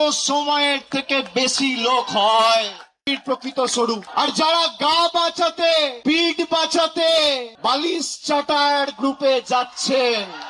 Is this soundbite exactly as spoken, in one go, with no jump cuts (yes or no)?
no